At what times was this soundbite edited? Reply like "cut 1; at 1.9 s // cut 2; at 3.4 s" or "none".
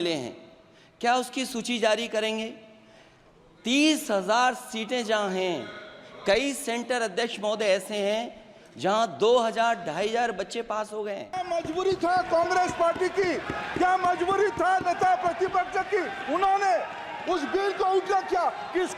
cut 1; at 11.4 s